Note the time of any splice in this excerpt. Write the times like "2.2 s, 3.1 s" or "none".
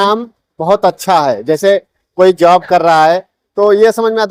none